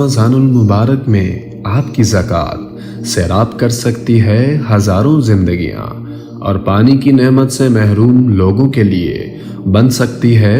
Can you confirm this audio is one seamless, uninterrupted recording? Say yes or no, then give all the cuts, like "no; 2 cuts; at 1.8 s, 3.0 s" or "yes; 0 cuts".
no; 1 cut; at 3.8 s